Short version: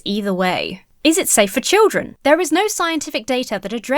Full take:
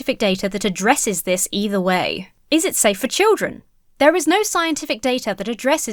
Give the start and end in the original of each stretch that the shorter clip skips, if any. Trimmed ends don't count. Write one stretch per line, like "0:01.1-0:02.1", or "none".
0:03.5-0:03.8